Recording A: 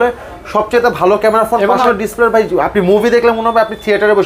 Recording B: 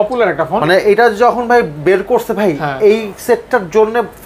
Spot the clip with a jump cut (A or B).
A